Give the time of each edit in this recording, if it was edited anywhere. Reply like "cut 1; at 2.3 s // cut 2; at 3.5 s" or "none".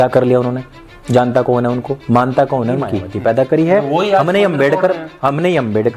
cut 1; at 3.0 s